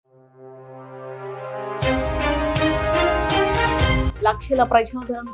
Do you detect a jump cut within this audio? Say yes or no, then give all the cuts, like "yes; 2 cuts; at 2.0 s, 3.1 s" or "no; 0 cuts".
yes; 1 cut; at 4.0 s